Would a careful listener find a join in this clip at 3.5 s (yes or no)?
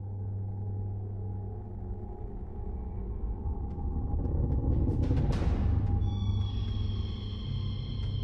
no